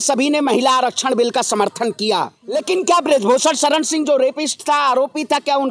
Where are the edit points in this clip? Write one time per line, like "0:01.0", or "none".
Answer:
0:02.4